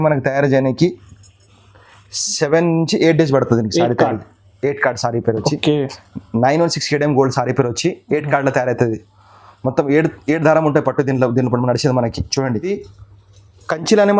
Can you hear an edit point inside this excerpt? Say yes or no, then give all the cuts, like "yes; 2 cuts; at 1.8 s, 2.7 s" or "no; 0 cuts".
yes; 1 cut; at 12.7 s